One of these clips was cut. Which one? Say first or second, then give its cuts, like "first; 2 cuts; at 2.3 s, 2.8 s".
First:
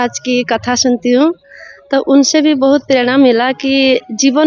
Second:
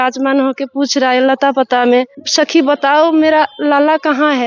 second; 1 cut; at 2.2 s